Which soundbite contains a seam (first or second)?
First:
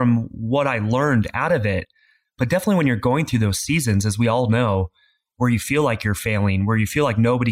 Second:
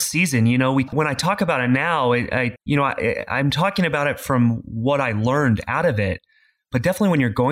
second